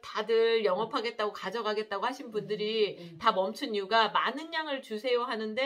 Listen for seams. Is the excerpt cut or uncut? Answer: uncut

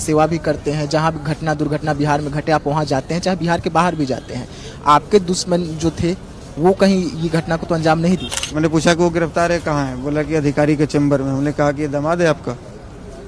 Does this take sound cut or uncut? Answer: cut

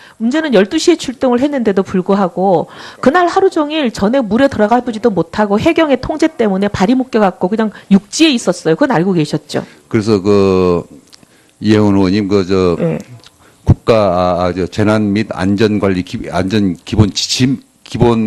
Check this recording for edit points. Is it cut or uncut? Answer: uncut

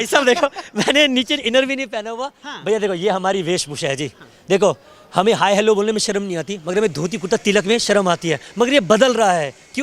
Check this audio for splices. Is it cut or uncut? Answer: uncut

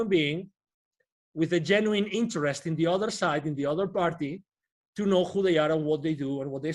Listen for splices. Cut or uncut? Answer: uncut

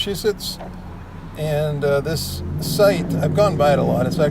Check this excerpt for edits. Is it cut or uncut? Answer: cut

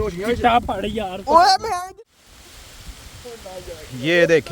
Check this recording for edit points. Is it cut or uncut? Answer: cut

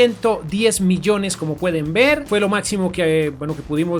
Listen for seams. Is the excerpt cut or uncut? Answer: uncut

